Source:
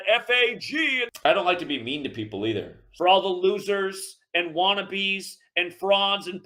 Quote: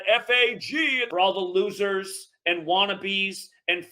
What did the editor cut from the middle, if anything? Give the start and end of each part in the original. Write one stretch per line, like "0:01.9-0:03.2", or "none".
0:01.0-0:02.9